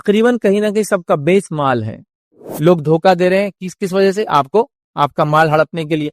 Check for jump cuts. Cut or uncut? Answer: cut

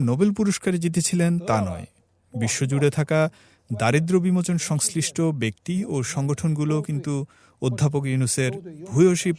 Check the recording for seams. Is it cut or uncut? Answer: uncut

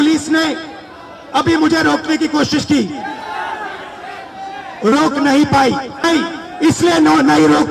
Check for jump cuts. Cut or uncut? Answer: cut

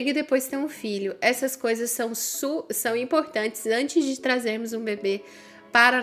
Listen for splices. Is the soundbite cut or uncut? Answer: uncut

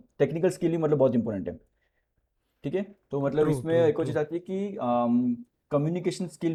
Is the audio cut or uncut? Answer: uncut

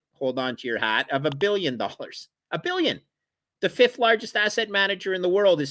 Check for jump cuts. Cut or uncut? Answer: uncut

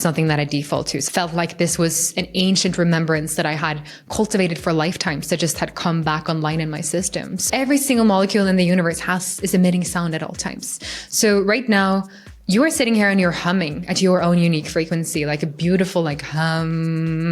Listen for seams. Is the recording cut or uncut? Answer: cut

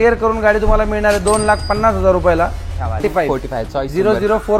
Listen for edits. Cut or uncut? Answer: cut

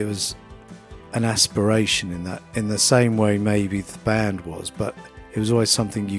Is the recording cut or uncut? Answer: uncut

